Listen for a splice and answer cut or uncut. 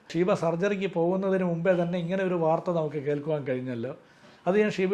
uncut